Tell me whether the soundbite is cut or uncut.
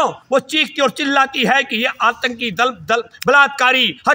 uncut